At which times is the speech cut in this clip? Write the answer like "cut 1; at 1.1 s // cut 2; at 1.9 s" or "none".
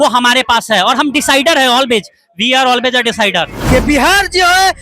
cut 1; at 3.6 s